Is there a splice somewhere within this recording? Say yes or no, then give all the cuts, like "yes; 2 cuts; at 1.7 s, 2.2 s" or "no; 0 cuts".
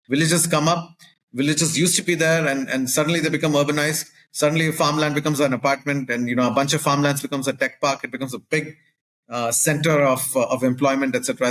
no; 0 cuts